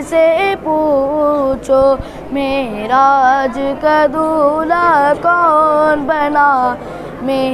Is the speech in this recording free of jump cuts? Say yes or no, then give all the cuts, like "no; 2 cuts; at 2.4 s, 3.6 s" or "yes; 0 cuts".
yes; 0 cuts